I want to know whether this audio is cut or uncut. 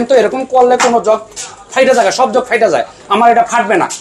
uncut